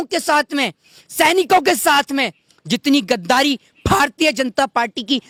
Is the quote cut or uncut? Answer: uncut